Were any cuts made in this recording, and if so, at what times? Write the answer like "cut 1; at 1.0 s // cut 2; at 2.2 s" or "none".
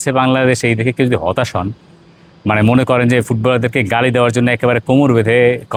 none